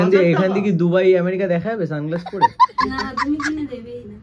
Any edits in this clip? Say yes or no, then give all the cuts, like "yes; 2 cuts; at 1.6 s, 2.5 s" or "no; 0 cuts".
yes; 2 cuts; at 2.3 s, 2.8 s